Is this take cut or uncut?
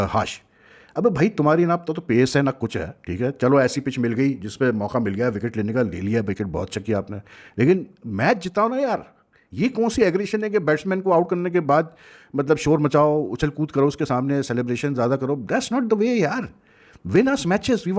uncut